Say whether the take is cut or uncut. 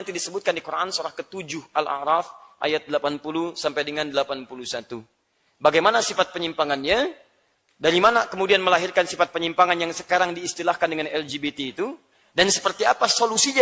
uncut